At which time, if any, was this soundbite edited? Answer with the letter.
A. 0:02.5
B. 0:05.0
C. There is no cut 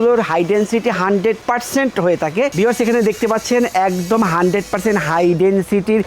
A